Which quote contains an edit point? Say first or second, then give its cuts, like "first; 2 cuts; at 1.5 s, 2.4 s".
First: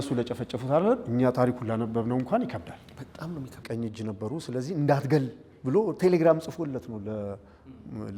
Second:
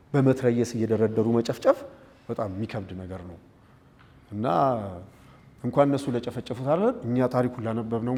first; 1 cut; at 3.6 s